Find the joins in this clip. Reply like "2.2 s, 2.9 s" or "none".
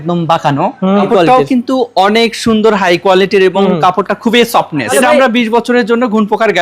1.0 s, 4.9 s